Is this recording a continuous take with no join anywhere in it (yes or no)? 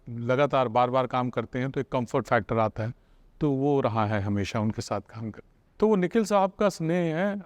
yes